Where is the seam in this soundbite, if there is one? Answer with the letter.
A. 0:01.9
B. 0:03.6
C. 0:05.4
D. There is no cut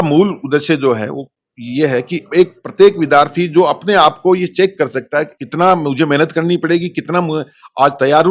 C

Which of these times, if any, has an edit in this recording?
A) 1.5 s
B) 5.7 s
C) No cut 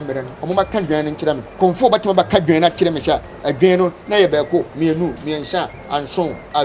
A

